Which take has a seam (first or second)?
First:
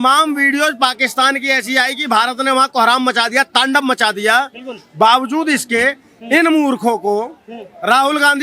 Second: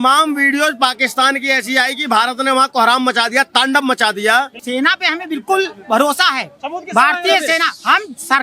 second